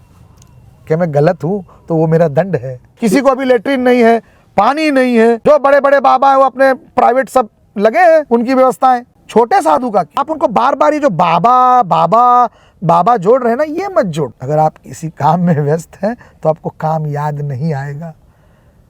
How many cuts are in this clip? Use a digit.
6